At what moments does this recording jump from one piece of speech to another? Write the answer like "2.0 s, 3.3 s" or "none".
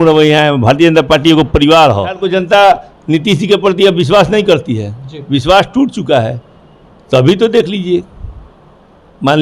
2.2 s